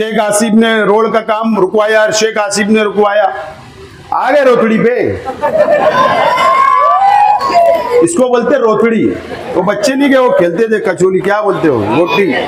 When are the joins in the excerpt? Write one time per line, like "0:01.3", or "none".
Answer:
none